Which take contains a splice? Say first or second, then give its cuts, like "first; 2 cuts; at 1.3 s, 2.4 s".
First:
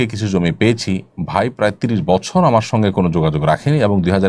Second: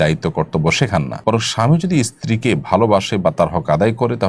second; 1 cut; at 1.1 s